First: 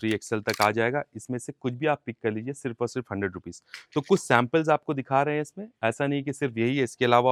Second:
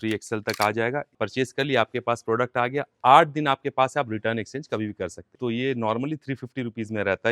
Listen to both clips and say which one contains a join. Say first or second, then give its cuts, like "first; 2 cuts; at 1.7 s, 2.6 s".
second; 2 cuts; at 1.1 s, 5.2 s